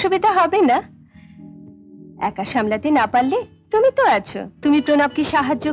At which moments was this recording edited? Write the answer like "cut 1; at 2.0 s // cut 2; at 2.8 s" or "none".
cut 1; at 4.4 s